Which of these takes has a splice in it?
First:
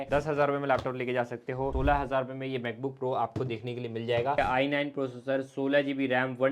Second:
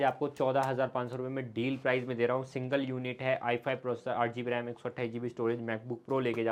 first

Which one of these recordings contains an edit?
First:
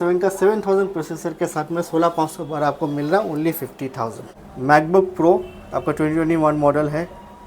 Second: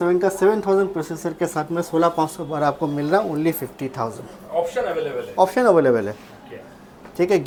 first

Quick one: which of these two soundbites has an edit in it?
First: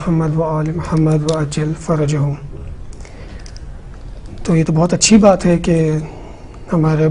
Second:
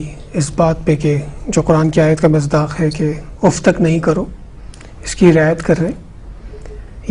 first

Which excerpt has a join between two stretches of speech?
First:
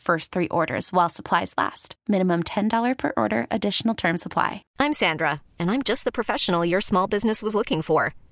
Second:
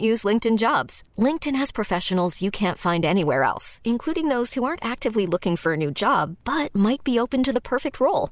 first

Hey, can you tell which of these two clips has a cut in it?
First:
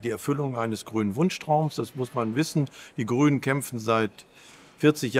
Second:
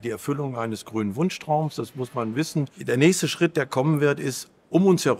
second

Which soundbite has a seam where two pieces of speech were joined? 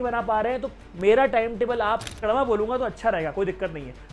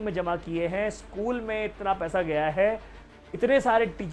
first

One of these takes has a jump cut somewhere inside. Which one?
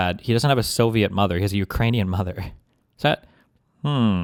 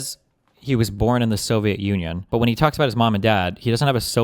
second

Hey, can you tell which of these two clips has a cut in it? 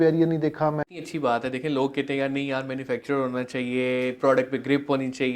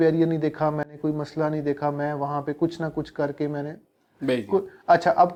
first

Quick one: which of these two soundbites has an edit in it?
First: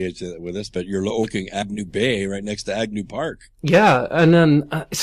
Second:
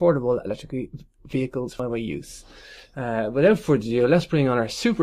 first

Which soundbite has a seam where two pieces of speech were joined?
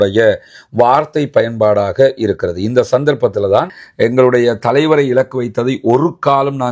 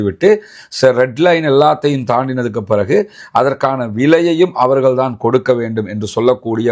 first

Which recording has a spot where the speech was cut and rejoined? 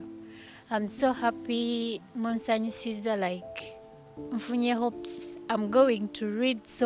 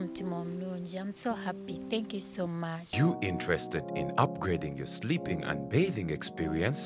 second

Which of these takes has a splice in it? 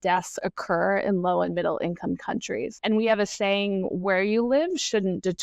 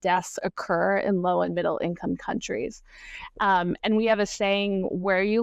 first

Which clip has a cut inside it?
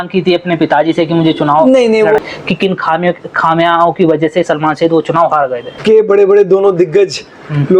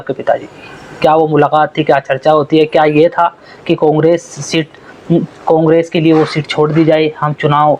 first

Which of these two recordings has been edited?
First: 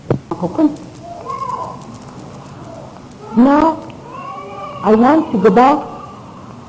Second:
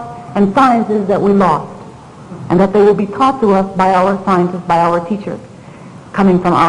first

